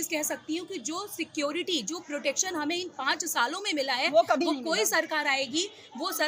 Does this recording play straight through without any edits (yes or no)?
yes